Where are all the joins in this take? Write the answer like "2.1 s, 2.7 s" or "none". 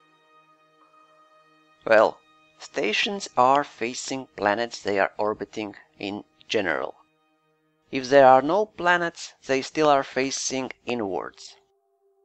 10.0 s